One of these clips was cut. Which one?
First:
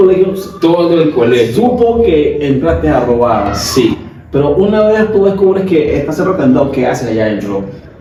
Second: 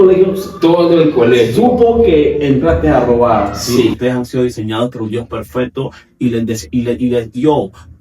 second; 1 cut; at 4.0 s

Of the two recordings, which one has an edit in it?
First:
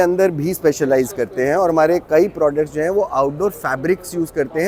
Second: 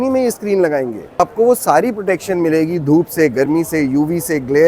second; 1 cut; at 1.2 s

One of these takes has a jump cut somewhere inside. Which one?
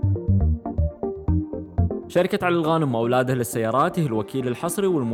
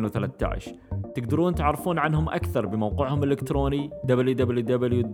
first; 1 cut; at 2.1 s

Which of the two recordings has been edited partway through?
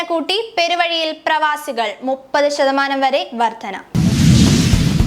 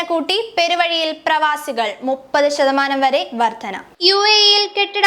first; 1 cut; at 3.9 s

